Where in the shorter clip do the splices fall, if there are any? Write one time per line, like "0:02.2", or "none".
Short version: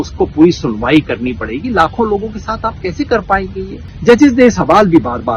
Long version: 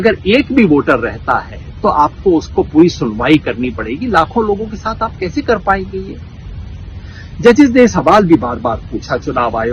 0:03.8